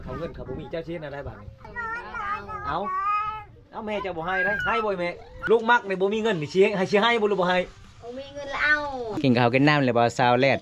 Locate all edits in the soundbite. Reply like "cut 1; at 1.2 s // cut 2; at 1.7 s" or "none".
cut 1; at 1.7 s // cut 2; at 5.3 s // cut 3; at 9.2 s